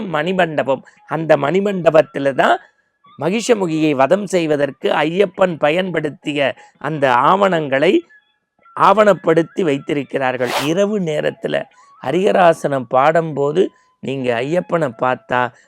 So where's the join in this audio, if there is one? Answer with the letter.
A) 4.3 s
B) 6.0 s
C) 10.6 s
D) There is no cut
C